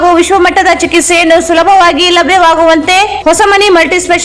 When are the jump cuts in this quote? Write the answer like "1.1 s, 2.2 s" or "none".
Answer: none